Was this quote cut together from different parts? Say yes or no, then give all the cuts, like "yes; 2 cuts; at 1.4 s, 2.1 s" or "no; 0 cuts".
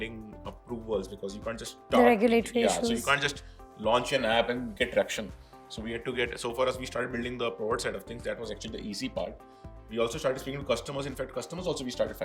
no; 0 cuts